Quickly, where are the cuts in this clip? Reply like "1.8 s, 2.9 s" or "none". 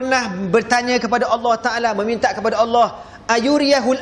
none